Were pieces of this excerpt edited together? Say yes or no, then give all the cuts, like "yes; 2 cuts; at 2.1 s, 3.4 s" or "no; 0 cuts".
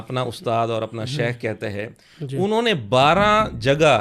no; 0 cuts